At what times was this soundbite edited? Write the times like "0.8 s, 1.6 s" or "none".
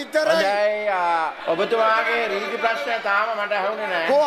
1.3 s